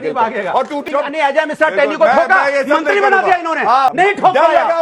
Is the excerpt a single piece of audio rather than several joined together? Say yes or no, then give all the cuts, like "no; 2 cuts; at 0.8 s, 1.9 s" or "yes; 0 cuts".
no; 2 cuts; at 0.8 s, 3.9 s